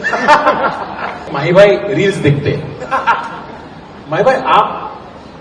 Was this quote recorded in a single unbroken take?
no; 1 cut; at 1.3 s

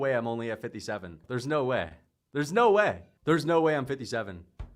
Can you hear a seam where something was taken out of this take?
yes; 2 cuts; at 1.3 s, 3.1 s

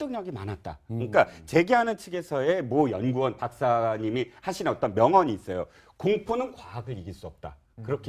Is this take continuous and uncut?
yes; 0 cuts

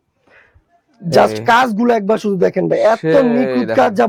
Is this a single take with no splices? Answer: yes; 0 cuts

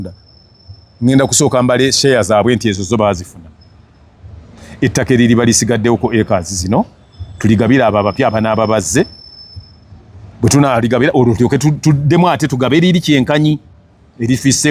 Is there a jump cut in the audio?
no; 0 cuts

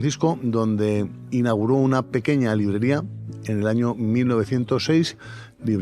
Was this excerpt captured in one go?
no; 1 cut; at 1.2 s

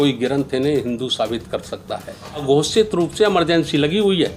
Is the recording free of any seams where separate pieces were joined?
no; 1 cut; at 2.4 s

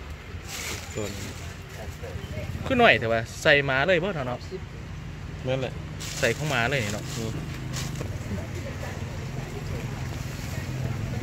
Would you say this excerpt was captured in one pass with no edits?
no; 1 cut; at 8.0 s

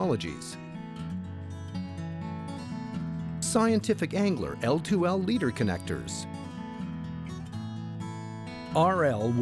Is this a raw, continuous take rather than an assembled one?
yes; 0 cuts

